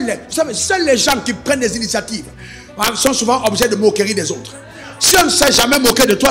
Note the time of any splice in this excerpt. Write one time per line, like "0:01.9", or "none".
none